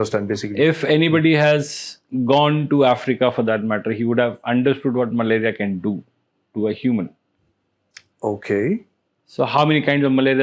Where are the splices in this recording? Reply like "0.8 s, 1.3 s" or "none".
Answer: none